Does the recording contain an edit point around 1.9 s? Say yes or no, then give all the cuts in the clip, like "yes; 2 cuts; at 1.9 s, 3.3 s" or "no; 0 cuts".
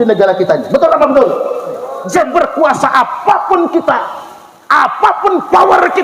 yes; 1 cut; at 1.9 s